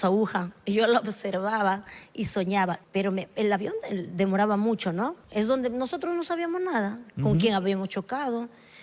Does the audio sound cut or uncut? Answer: cut